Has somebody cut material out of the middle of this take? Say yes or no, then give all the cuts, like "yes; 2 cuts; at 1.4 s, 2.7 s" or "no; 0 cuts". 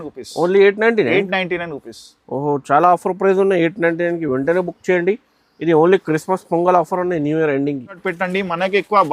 yes; 1 cut; at 8.0 s